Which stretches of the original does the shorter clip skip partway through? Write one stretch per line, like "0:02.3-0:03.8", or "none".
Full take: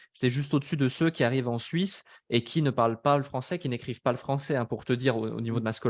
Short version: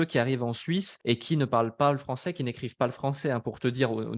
0:02.0-0:02.2